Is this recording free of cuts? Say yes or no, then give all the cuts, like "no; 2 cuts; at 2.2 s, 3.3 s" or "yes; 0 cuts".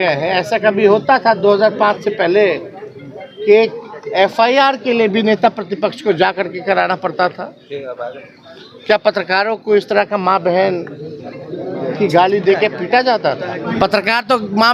no; 1 cut; at 13.6 s